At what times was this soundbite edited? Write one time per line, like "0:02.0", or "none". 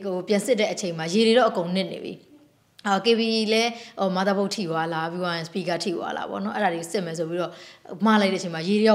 none